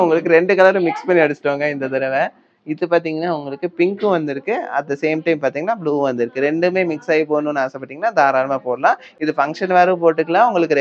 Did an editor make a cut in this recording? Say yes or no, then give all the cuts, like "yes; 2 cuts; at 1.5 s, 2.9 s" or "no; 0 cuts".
no; 0 cuts